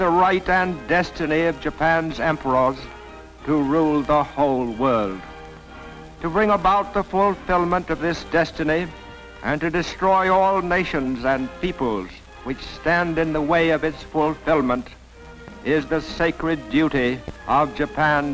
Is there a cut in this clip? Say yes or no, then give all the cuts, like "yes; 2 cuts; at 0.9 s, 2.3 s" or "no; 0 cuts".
yes; 1 cut; at 9.8 s